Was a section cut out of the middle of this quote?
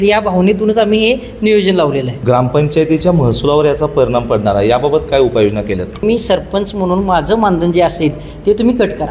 yes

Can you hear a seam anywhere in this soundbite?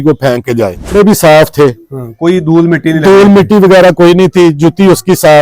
yes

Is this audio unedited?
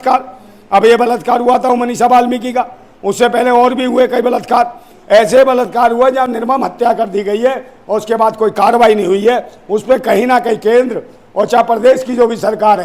yes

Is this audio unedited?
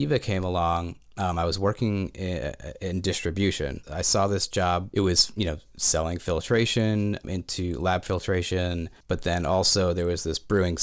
no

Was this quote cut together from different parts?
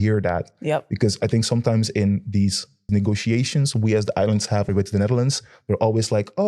yes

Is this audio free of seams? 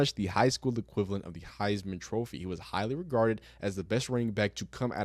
yes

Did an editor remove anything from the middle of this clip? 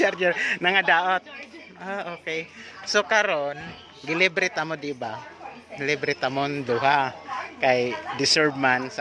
no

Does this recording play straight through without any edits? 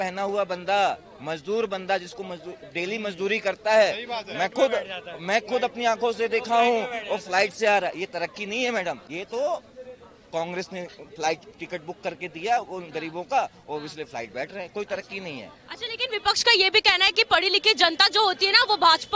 yes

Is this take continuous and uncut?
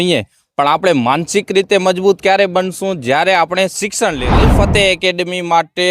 no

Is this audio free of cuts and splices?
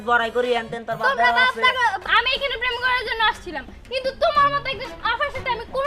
no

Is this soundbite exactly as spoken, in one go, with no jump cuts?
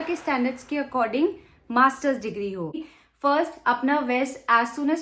no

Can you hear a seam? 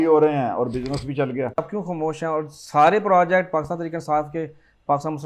yes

